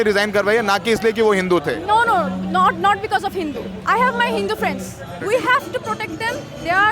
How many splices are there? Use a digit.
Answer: 1